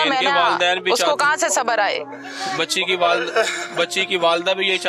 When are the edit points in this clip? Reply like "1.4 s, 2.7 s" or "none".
none